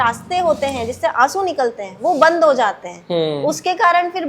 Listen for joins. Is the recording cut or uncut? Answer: uncut